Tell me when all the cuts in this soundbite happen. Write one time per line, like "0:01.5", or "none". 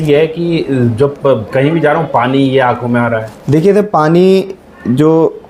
none

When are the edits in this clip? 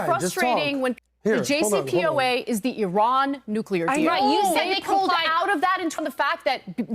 0:01.0
0:06.0

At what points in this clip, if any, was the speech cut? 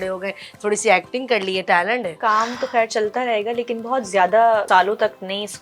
0:02.1
0:04.6

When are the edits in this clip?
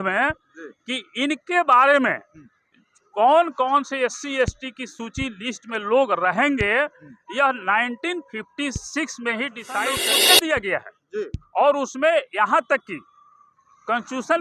0:10.0

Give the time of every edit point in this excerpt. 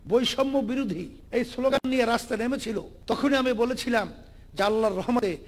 0:01.1
0:02.9

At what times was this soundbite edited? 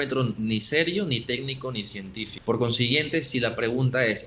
0:02.3

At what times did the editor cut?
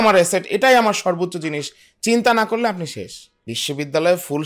0:03.2

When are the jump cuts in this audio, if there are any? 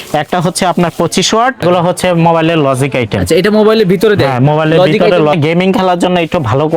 0:01.6
0:05.4

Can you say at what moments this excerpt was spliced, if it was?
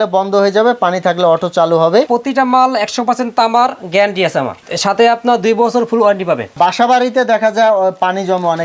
0:02.1
0:06.6

